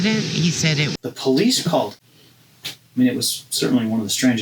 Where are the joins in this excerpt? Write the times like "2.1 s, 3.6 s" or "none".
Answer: 0.9 s, 2.0 s